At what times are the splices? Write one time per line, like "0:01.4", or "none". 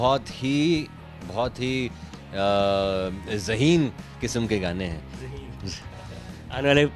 none